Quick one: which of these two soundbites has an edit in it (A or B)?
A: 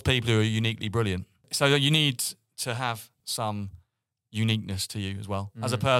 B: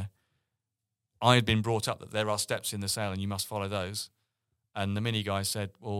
A